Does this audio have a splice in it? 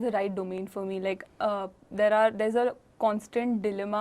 no; 0 cuts

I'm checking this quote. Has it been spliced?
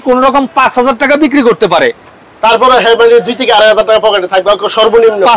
no; 0 cuts

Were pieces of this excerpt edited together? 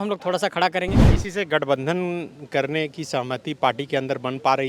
yes; 1 cut; at 1.1 s

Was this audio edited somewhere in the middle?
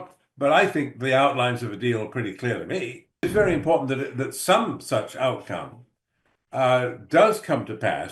yes; 1 cut; at 3.2 s

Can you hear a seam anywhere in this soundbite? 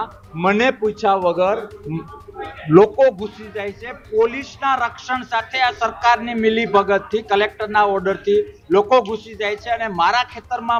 no; 0 cuts

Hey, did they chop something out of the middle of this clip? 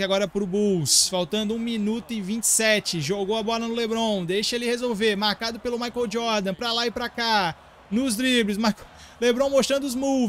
no; 0 cuts

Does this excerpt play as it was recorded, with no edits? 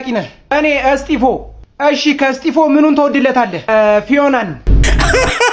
no; 1 cut; at 4.6 s

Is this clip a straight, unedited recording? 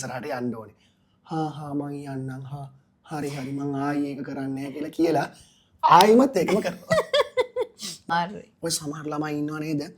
no; 1 cut; at 8.1 s

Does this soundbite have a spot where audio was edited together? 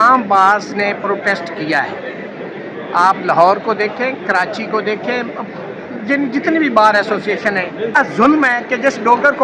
yes; 1 cut; at 7.9 s

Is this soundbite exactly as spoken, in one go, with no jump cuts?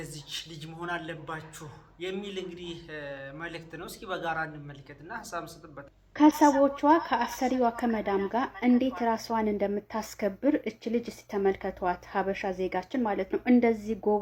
yes; 0 cuts

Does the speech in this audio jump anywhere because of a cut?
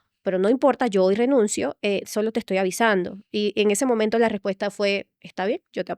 no; 0 cuts

